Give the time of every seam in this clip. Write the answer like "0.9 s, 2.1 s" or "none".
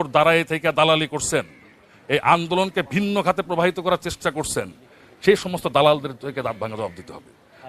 none